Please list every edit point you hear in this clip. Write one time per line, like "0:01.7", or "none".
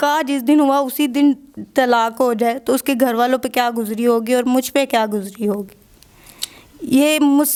none